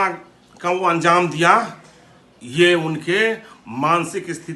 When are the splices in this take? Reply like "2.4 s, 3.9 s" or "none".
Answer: none